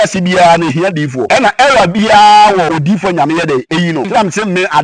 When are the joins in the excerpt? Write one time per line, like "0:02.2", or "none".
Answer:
0:01.2
0:02.7
0:04.1